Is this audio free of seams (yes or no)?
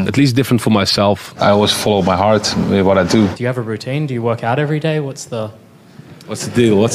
no